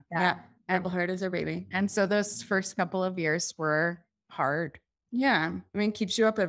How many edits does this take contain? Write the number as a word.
zero